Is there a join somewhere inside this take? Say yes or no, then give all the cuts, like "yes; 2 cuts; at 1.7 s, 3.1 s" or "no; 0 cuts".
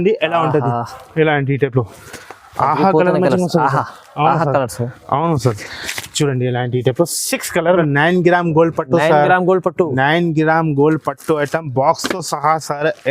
yes; 1 cut; at 7.8 s